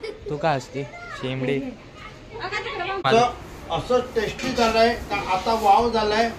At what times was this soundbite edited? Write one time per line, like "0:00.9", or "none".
0:03.0